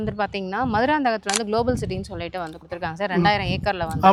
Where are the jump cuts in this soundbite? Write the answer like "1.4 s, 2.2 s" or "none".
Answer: none